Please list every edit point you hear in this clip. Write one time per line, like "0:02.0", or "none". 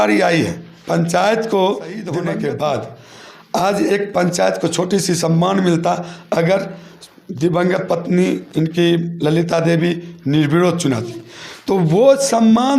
0:02.1